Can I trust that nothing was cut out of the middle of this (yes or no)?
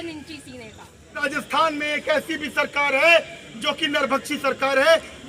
no